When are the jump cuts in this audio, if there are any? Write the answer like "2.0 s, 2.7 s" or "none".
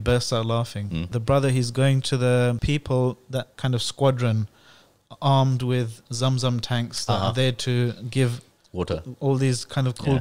1.1 s, 2.6 s, 3.5 s